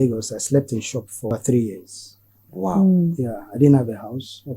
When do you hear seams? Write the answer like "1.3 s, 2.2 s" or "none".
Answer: 1.3 s